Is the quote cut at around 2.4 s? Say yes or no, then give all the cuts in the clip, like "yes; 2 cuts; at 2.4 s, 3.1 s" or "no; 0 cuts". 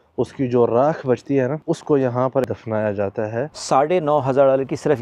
yes; 3 cuts; at 1.6 s, 2.4 s, 3.6 s